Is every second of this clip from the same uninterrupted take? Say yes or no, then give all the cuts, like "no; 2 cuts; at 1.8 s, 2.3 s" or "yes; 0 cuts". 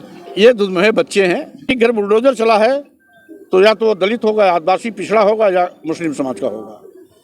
no; 1 cut; at 1.6 s